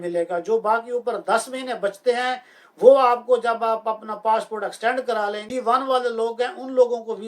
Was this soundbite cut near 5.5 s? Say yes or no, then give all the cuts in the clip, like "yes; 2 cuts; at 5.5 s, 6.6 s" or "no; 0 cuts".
yes; 1 cut; at 5.5 s